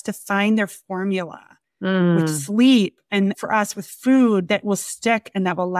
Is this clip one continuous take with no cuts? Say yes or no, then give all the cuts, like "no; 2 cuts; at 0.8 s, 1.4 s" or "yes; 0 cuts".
no; 2 cuts; at 3.1 s, 4.4 s